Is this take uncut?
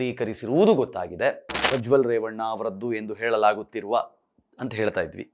no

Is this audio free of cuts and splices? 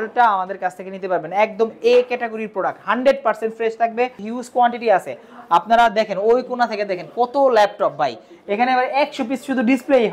no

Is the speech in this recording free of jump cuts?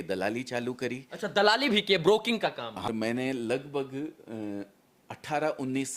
no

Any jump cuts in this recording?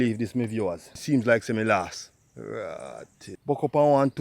yes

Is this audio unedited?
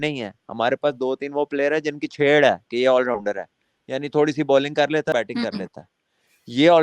no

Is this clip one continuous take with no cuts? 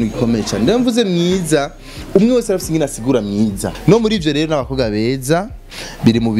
no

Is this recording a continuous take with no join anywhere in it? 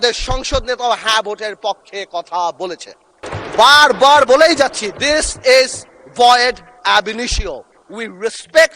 no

